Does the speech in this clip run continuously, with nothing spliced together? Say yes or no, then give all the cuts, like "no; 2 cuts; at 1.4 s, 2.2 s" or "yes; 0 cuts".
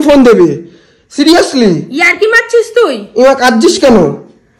yes; 0 cuts